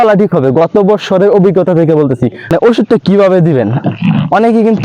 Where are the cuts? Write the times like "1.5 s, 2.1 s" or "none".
2.5 s